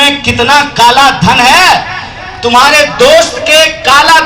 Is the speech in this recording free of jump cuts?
yes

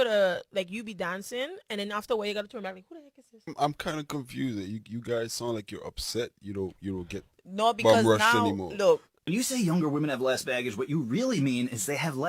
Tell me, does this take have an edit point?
yes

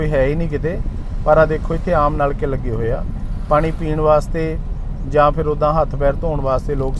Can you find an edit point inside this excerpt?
no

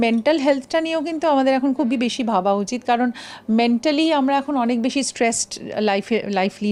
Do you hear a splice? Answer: no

